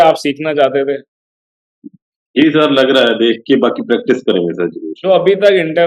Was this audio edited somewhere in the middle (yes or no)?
no